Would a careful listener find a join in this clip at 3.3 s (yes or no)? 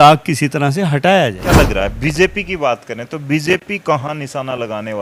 no